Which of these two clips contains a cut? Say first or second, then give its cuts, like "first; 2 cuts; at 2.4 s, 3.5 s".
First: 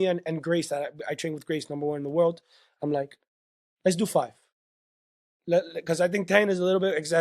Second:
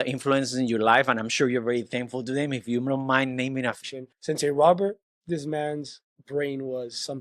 second; 1 cut; at 3.8 s